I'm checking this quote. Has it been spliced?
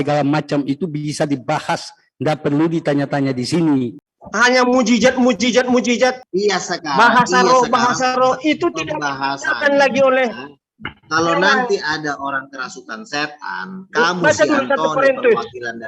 yes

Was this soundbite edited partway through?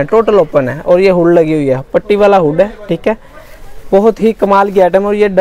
no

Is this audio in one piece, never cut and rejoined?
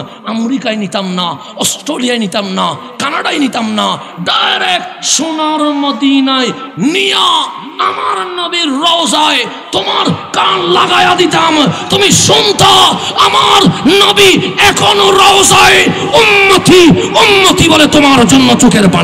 yes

